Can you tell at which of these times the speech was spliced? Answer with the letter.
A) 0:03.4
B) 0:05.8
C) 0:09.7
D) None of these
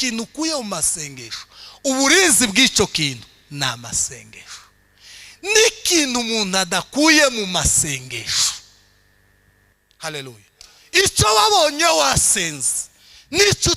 C